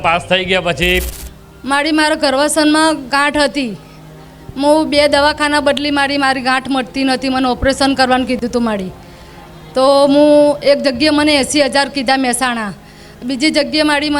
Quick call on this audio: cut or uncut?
cut